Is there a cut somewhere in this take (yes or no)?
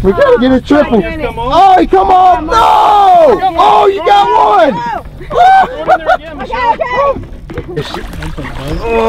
yes